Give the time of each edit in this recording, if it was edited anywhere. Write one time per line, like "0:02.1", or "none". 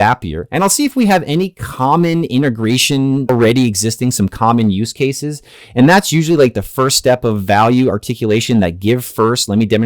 0:03.3